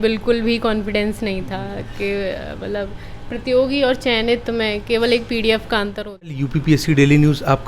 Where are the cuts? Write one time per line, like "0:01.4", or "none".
0:06.4